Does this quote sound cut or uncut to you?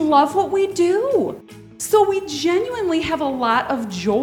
uncut